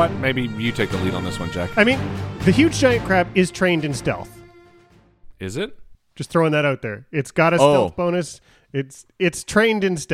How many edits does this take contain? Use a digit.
1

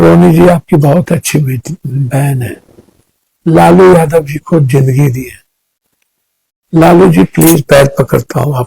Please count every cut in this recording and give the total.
0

